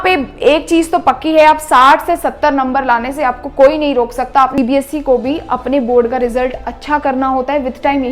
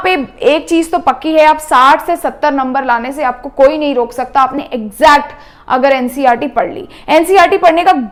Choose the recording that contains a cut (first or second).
first